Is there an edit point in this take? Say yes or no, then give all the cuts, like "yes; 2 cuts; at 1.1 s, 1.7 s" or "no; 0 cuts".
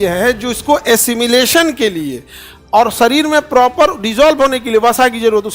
no; 0 cuts